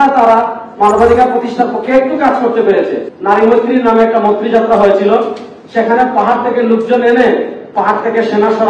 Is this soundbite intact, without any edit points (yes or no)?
no